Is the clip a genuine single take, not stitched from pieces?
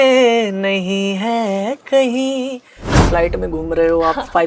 no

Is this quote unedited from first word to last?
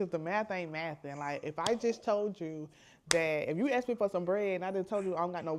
yes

